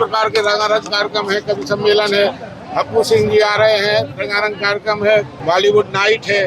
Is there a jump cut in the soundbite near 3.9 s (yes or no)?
no